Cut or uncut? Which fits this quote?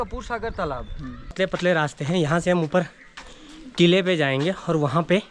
cut